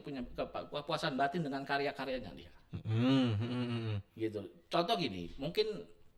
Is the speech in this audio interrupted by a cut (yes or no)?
no